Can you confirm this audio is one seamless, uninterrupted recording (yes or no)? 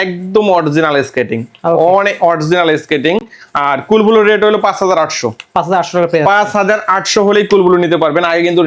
yes